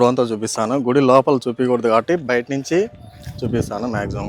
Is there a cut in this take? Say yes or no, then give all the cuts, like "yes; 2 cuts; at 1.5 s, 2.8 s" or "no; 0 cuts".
no; 0 cuts